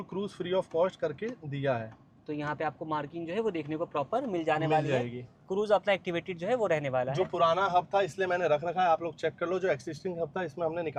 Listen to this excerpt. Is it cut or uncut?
uncut